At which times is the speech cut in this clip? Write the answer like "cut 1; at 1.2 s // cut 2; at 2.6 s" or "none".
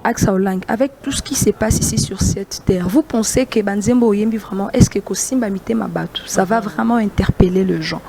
none